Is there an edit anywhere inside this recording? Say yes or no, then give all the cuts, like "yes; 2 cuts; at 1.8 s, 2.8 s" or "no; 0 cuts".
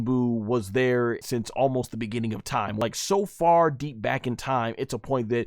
yes; 2 cuts; at 1.2 s, 2.8 s